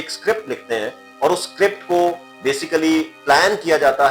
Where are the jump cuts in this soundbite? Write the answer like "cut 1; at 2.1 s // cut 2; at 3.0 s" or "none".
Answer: none